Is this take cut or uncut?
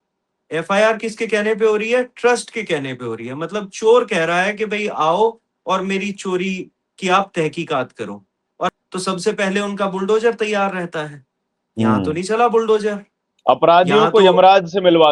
cut